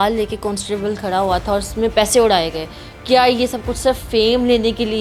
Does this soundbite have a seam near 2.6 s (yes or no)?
no